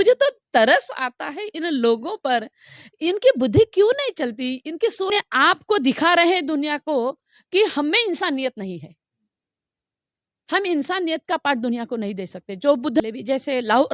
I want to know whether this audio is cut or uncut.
cut